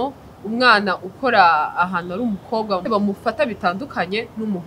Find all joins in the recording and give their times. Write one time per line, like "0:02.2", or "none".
0:02.8